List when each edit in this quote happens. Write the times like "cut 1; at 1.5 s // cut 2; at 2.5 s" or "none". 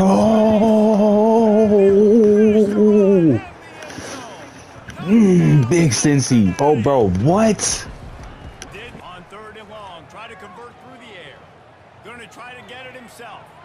cut 1; at 7.6 s